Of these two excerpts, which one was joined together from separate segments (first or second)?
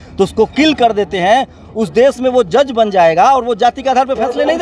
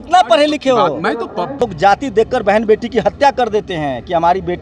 second